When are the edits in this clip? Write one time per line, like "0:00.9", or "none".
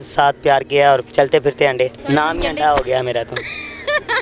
0:01.1
0:02.0